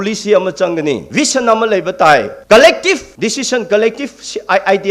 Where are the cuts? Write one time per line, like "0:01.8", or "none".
0:01.0
0:02.3
0:03.1